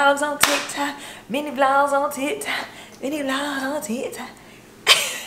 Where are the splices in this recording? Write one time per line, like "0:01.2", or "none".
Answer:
none